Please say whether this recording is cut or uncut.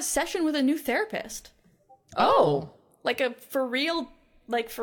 uncut